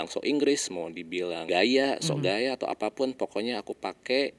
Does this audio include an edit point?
yes; 1 cut; at 1.4 s

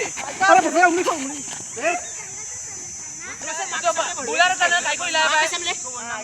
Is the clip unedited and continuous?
no; 1 cut; at 3.5 s

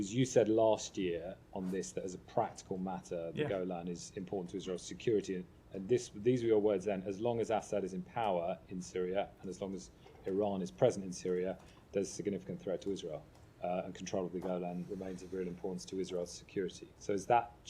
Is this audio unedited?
yes; 0 cuts

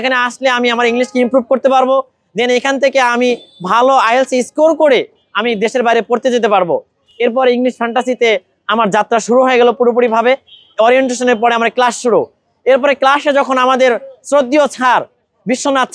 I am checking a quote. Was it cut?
no; 0 cuts

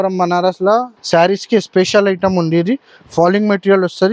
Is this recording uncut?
no; 1 cut; at 0.9 s

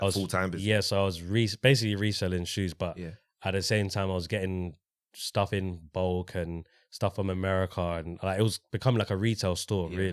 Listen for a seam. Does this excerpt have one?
no; 0 cuts

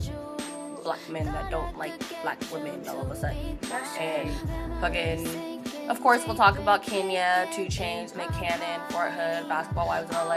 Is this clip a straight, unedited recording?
yes; 0 cuts

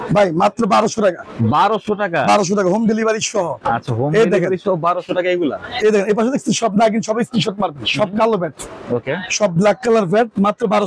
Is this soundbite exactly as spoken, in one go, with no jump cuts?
yes; 0 cuts

